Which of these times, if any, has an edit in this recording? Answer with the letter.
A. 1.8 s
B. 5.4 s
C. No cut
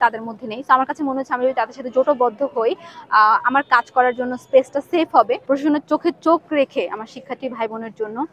B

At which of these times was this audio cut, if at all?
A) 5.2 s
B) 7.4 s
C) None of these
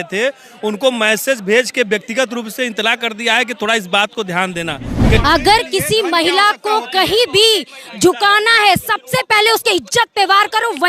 A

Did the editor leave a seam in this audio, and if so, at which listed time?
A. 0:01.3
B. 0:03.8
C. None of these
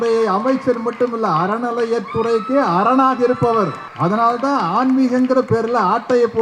B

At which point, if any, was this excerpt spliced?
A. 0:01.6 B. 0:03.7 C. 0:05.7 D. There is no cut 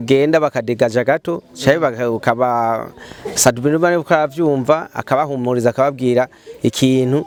D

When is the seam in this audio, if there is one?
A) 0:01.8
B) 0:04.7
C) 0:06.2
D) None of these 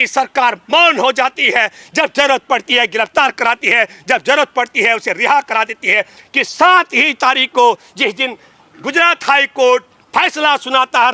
C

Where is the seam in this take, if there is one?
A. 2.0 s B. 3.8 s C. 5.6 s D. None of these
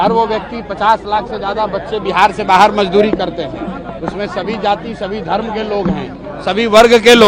D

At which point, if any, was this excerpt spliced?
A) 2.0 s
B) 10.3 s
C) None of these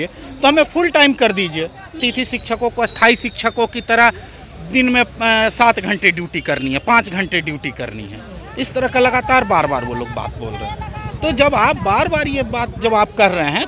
A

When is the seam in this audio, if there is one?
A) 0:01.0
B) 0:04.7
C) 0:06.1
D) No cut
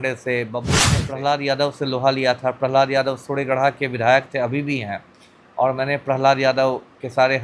A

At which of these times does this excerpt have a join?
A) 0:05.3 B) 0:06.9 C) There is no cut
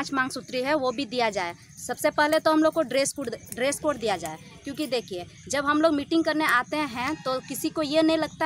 C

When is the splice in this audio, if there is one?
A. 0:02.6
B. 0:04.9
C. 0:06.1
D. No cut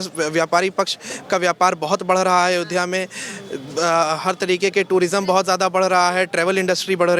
D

